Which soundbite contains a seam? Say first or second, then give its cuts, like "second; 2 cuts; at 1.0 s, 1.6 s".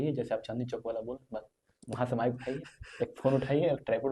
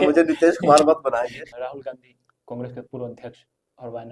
second; 1 cut; at 1.4 s